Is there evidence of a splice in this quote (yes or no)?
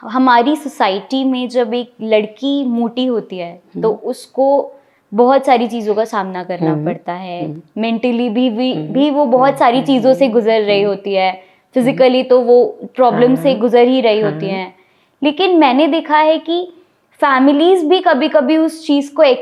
no